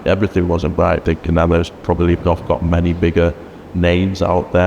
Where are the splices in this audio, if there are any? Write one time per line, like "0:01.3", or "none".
0:01.0